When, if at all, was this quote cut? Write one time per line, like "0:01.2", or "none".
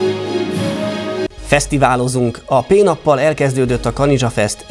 0:01.2